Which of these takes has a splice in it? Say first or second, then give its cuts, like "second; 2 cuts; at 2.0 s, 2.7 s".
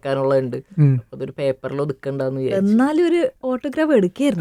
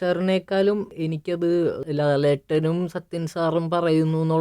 second; 2 cuts; at 0.9 s, 1.8 s